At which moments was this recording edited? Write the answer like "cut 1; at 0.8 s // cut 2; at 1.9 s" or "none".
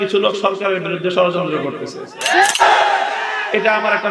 cut 1; at 2.6 s